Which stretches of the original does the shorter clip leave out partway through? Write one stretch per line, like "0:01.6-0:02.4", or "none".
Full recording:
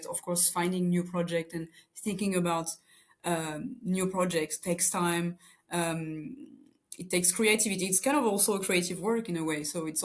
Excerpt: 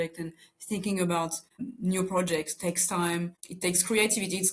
0:03.0-0:03.6
0:05.5-0:06.9

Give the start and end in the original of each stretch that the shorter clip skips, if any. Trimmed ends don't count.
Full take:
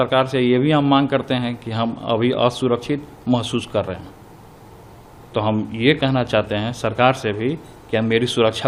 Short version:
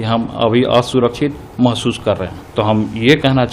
0:04.1-0:05.2

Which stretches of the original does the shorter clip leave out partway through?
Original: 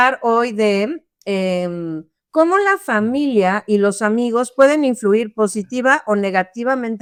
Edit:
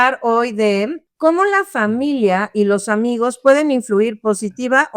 0:01.0-0:02.2

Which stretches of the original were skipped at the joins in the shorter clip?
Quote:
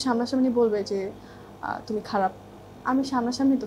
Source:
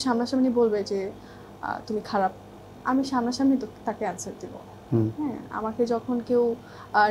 none

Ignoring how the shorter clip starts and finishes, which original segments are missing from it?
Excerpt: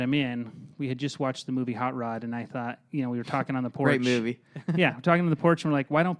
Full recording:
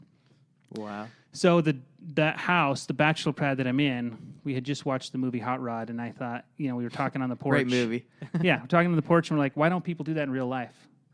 none

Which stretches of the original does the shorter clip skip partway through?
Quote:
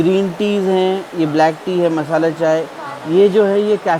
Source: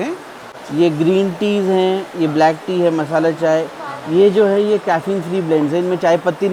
none

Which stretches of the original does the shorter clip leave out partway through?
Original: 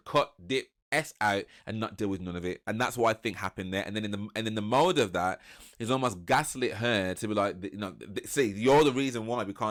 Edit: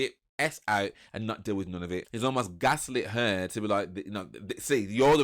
0:02.6-0:05.7

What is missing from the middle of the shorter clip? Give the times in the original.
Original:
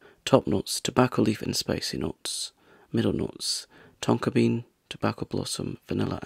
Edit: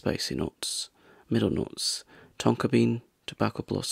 none

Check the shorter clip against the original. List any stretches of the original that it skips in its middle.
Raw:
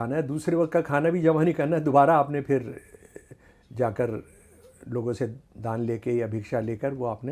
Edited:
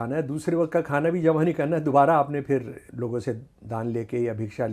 0:02.8-0:04.7

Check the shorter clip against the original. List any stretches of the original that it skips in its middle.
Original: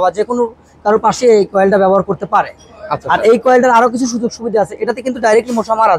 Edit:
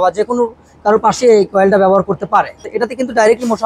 0:02.7-0:04.8

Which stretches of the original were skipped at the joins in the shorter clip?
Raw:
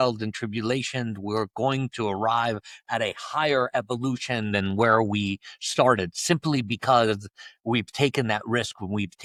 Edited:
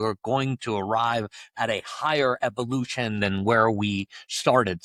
none

